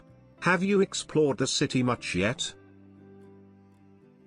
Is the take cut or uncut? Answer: cut